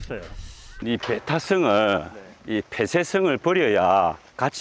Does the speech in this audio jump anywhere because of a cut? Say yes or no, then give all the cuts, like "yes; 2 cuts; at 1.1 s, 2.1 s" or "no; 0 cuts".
no; 0 cuts